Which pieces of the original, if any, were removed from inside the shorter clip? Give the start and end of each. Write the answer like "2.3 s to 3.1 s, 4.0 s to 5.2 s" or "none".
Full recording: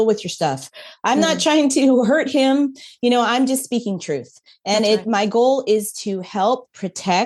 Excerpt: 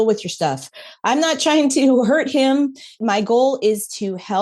3.0 s to 5.0 s

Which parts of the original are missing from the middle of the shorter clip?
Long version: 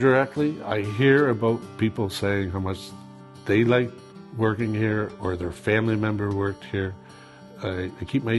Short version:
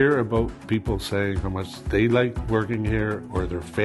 2.8 s to 3.3 s, 4.0 s to 4.3 s

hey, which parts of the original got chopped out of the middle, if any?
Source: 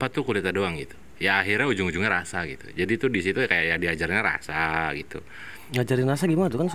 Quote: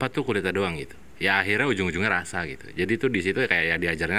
none

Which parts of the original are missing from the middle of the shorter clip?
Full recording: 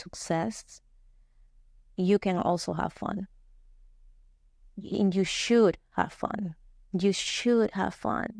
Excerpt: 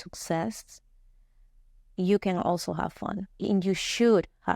3.3 s to 4.8 s

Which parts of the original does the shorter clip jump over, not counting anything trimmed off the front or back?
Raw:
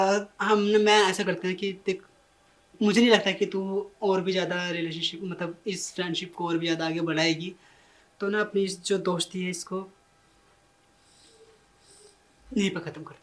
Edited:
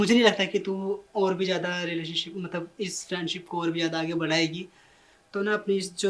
none

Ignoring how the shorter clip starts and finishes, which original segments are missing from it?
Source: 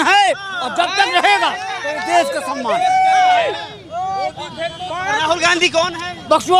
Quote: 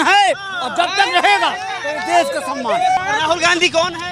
3.0 s to 5.0 s

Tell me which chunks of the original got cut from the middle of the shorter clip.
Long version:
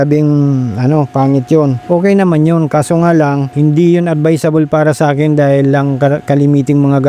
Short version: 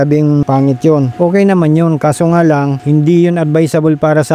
0.9 s to 1.6 s

